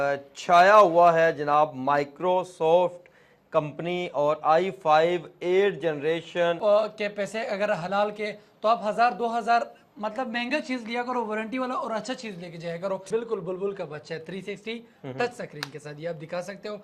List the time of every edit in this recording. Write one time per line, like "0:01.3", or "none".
0:06.6
0:13.0